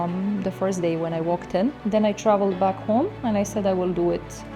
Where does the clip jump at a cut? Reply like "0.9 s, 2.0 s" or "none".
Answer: 1.8 s